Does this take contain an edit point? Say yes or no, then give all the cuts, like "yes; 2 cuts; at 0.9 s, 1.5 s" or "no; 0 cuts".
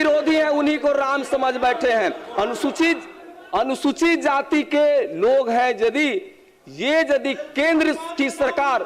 no; 0 cuts